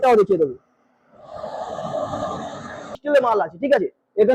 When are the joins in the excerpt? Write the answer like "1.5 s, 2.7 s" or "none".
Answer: 3.0 s